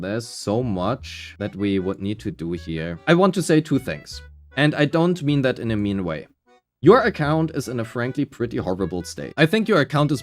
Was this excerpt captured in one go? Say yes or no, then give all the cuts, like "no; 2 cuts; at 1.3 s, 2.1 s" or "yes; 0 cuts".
no; 2 cuts; at 3.0 s, 9.2 s